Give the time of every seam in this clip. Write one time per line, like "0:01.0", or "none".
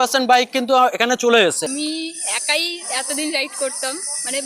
0:01.7